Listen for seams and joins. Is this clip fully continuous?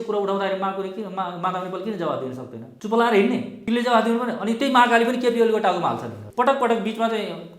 no; 3 cuts; at 2.6 s, 3.5 s, 6.2 s

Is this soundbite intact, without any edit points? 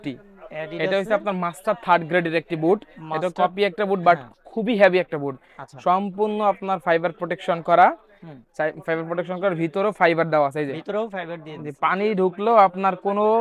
yes; 0 cuts

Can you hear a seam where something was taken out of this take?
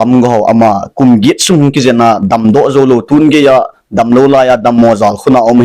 no; 0 cuts

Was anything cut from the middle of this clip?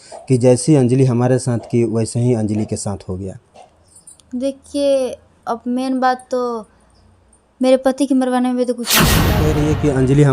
yes; 1 cut; at 9.3 s

